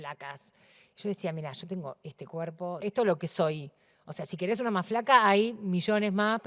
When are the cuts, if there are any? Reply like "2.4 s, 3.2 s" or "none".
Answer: 2.8 s